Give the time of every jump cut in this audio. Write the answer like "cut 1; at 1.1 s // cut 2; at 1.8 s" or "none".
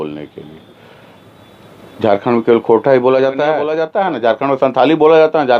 cut 1; at 3.6 s